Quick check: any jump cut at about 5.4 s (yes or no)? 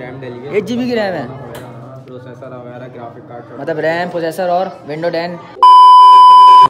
yes